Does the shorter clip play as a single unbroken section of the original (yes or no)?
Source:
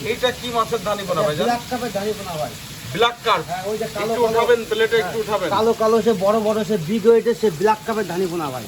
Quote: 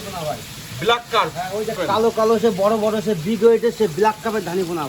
no